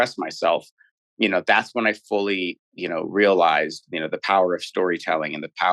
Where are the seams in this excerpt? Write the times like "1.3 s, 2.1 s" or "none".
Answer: none